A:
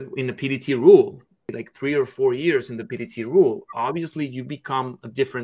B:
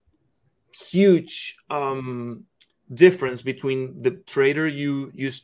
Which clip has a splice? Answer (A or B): A